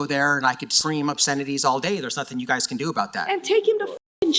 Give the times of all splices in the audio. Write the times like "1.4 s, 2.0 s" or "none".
3.3 s